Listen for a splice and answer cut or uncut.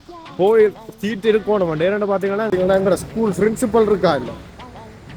cut